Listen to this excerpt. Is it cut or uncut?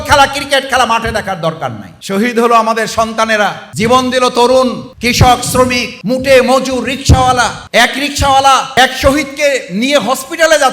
cut